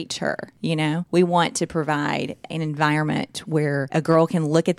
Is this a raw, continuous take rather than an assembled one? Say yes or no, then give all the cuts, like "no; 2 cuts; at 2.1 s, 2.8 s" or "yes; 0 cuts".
no; 3 cuts; at 0.8 s, 2.5 s, 3.9 s